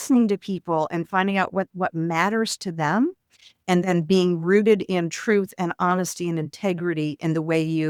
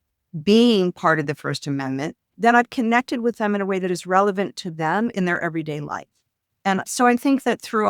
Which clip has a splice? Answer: second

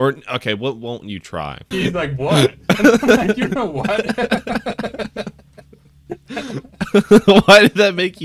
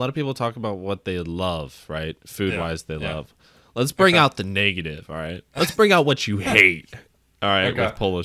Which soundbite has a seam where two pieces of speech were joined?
first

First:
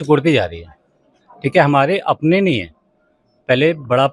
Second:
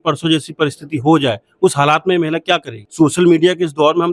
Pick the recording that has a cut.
second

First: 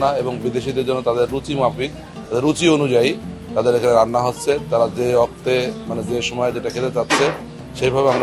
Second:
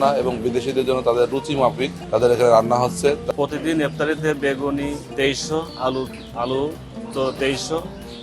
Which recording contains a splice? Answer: second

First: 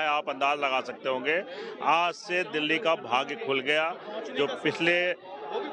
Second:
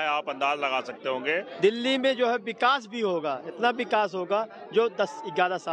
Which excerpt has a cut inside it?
second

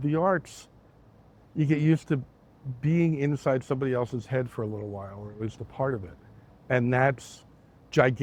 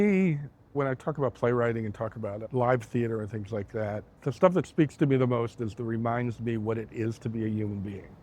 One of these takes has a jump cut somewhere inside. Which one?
second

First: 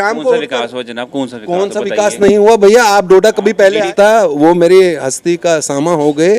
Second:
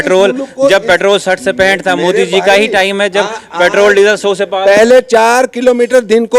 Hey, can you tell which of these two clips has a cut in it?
first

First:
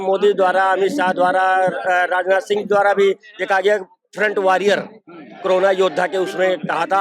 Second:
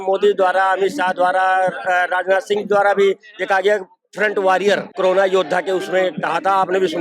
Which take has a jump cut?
second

